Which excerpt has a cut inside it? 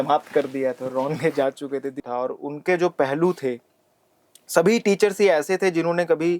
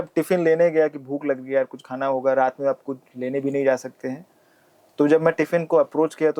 first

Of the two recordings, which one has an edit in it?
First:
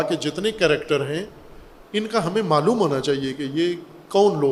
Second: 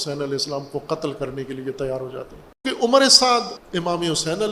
second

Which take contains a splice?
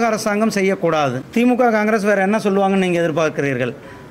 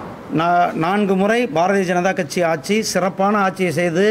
first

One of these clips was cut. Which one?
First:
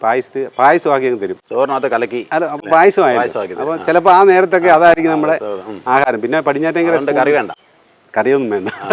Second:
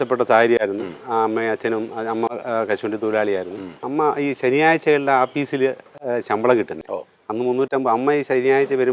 second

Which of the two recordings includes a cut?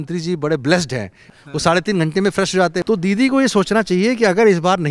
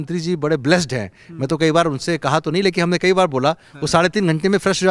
first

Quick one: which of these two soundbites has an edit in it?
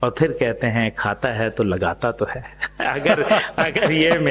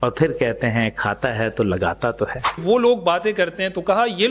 second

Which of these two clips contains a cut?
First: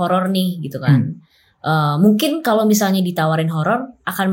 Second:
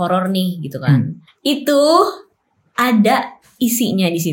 second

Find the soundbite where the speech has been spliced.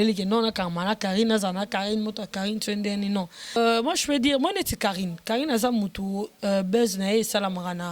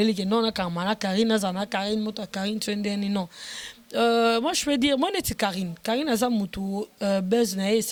first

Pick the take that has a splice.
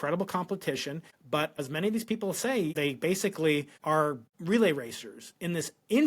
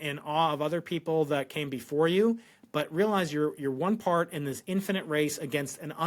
first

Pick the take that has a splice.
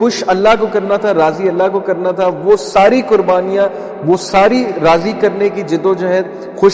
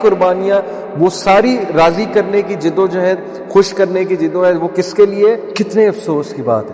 second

